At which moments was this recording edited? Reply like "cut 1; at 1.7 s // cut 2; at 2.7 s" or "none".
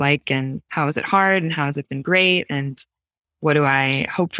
none